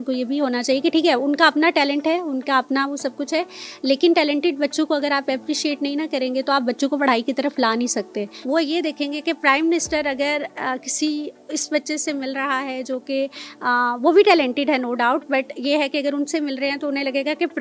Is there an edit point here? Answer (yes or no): no